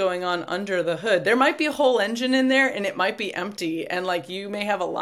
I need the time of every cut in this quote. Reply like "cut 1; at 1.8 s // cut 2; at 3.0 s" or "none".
none